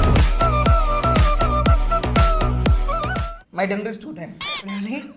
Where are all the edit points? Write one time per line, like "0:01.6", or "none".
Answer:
0:03.3